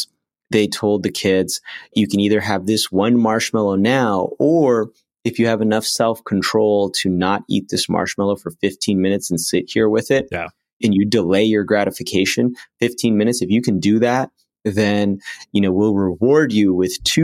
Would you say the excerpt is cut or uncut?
cut